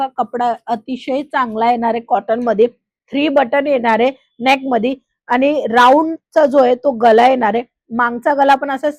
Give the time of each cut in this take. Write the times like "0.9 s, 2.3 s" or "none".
none